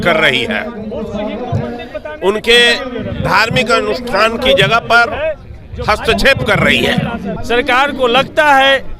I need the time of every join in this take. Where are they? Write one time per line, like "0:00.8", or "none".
0:07.3

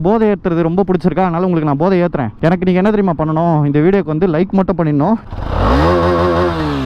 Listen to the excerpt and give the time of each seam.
0:02.3
0:05.2

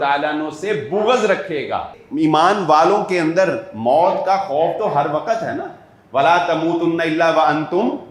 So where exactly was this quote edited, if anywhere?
0:02.0

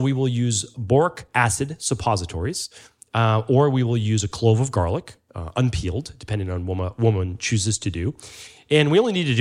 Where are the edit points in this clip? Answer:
0:01.2

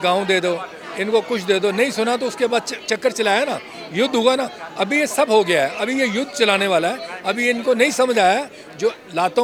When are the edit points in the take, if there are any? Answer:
none

